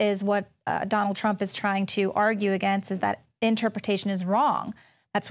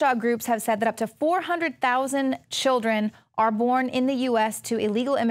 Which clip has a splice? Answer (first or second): first